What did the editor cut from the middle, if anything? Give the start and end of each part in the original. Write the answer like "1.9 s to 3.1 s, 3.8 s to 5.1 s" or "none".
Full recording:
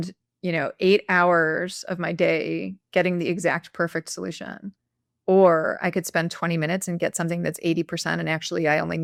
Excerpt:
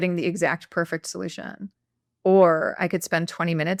none